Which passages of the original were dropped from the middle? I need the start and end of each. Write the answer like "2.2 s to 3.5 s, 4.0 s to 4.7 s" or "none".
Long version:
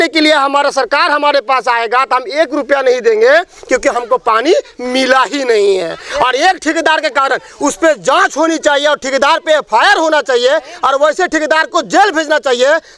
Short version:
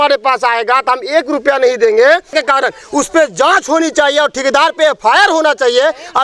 3.6 s to 7.0 s